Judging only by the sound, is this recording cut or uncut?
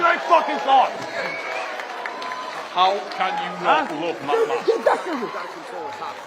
uncut